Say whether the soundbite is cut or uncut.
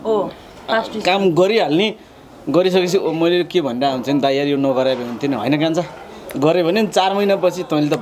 uncut